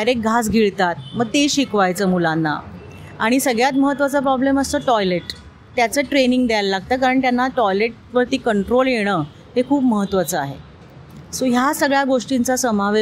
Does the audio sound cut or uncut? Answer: uncut